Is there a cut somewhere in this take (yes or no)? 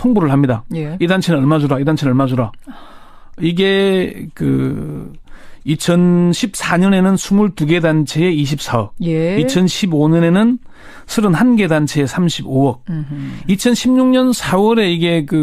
no